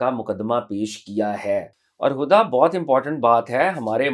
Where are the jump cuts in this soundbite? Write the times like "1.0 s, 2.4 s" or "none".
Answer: 1.7 s